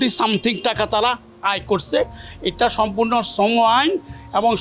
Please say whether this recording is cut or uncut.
uncut